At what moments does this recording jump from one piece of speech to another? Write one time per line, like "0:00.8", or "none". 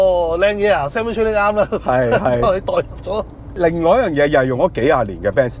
0:03.5